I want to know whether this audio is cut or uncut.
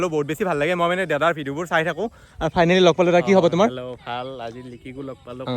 uncut